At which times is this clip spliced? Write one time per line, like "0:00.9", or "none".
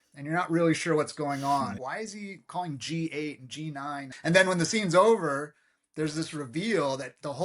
0:01.8
0:04.1